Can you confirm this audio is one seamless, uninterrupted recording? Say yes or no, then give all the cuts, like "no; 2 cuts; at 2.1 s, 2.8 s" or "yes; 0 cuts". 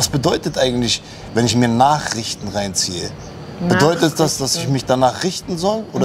yes; 0 cuts